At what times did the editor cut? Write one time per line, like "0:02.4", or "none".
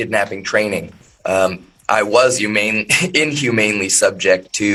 none